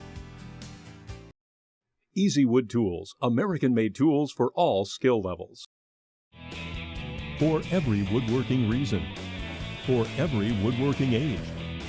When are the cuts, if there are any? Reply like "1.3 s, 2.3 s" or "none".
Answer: 1.0 s